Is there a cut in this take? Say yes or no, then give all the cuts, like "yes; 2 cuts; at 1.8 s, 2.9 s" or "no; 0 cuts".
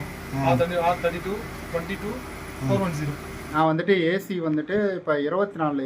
yes; 1 cut; at 3.8 s